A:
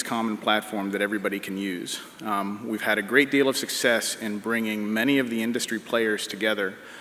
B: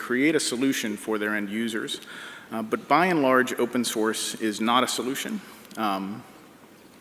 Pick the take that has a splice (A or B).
B